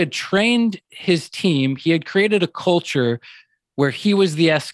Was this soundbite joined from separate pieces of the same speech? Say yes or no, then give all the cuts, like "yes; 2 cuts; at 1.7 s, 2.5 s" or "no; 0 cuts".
no; 0 cuts